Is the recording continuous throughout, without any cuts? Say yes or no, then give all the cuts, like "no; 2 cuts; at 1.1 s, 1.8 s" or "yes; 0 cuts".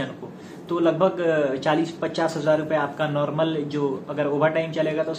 yes; 0 cuts